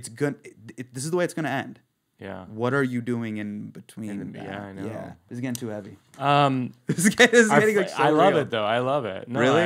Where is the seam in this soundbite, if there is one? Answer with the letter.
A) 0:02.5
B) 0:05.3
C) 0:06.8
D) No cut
B